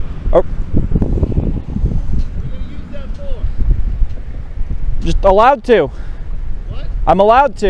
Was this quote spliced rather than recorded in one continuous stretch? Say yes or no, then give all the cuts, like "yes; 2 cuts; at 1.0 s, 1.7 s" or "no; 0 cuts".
no; 0 cuts